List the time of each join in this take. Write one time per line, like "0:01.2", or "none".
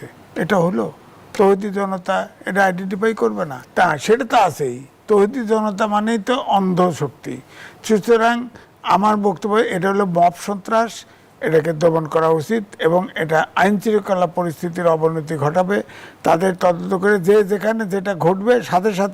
0:03.5